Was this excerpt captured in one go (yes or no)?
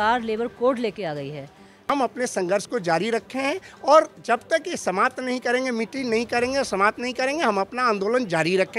no